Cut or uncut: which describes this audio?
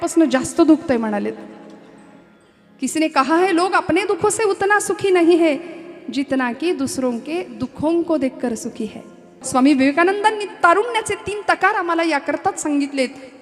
cut